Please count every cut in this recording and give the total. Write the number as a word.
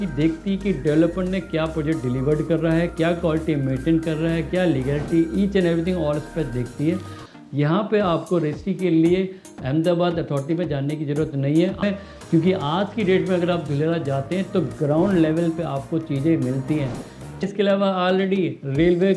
three